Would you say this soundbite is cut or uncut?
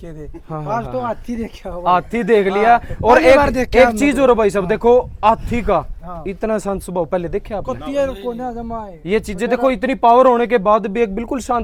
uncut